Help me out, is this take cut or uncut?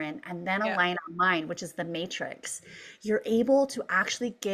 uncut